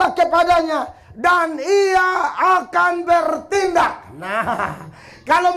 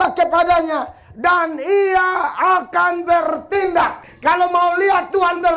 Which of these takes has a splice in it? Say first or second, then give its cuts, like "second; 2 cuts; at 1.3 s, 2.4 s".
second; 1 cut; at 4.1 s